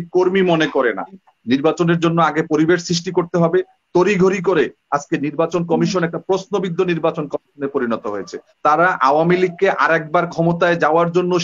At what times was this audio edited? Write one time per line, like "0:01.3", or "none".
0:01.3
0:08.4